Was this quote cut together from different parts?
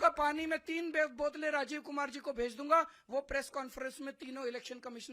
no; 0 cuts

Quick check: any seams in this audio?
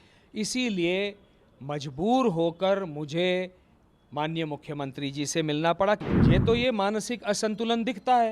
yes; 1 cut; at 6.0 s

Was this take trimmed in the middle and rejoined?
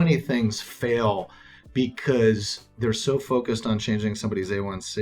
no; 0 cuts

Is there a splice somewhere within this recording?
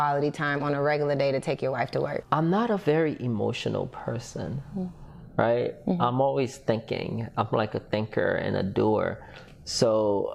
yes; 1 cut; at 2.2 s

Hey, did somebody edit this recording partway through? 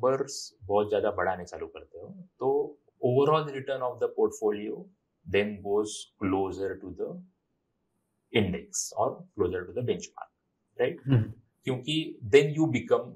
no; 0 cuts

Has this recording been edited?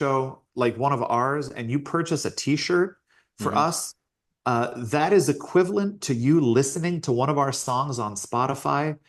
no; 0 cuts

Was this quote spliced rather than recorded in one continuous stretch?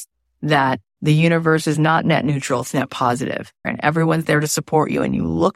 yes; 1 cut; at 3.7 s

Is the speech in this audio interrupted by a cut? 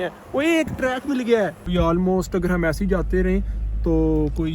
yes; 1 cut; at 1.6 s

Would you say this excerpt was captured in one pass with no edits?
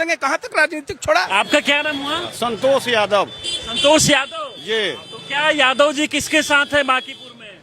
no; 2 cuts; at 1.3 s, 2.3 s

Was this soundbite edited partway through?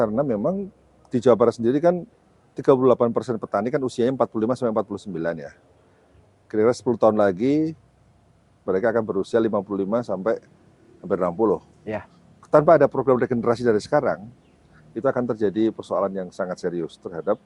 no; 0 cuts

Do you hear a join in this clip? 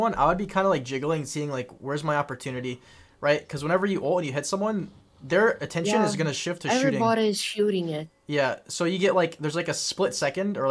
no; 0 cuts

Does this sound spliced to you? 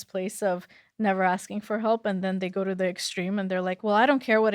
no; 0 cuts

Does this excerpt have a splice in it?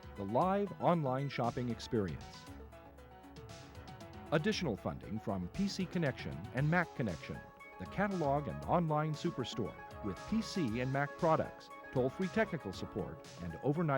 yes; 2 cuts; at 2.2 s, 4.1 s

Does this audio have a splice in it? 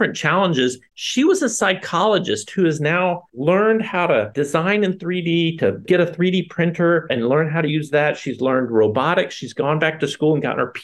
yes; 3 cuts; at 0.9 s, 4.3 s, 5.8 s

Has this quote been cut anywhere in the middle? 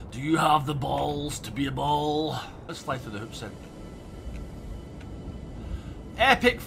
yes; 1 cut; at 2.7 s

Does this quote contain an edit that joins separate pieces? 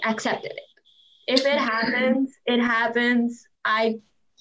no; 0 cuts

